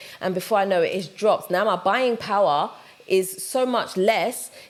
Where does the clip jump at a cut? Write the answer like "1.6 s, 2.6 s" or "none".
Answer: none